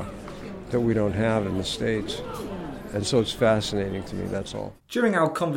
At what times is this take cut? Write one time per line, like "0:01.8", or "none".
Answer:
none